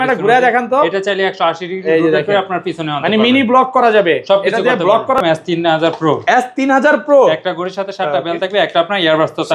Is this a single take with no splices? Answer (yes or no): no